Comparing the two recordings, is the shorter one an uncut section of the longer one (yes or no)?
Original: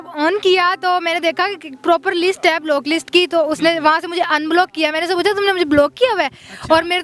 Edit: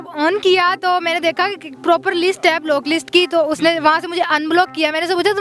yes